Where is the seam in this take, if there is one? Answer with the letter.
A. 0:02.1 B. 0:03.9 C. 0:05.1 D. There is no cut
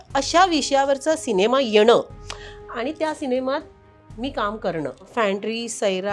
C